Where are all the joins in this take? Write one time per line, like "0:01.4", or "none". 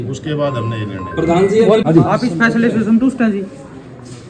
0:01.8